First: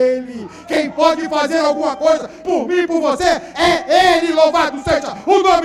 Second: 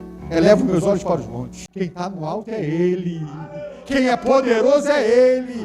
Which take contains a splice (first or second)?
second